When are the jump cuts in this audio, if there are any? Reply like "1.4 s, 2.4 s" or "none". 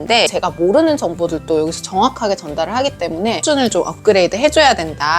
3.4 s